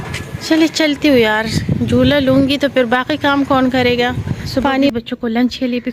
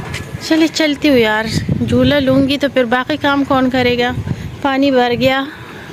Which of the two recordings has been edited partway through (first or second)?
first